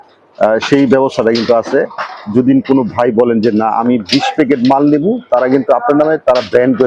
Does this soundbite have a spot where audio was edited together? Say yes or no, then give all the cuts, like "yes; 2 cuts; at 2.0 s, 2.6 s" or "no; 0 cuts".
no; 0 cuts